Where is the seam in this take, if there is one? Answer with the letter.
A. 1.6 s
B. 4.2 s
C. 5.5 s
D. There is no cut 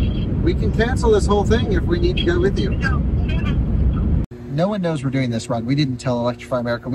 B